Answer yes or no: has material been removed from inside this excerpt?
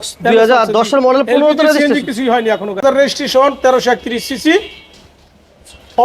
yes